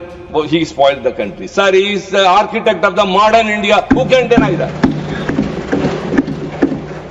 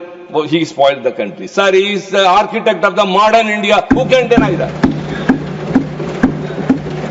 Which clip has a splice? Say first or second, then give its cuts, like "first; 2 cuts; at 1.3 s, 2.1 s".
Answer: first; 1 cut; at 5.3 s